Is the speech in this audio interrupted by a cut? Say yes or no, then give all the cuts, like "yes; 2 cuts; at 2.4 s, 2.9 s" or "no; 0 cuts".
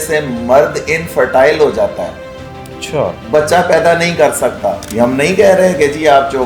yes; 1 cut; at 4.8 s